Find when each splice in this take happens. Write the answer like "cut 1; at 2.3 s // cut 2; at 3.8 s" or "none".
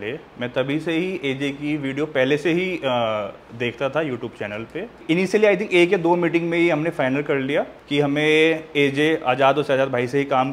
cut 1; at 5.0 s // cut 2; at 7.8 s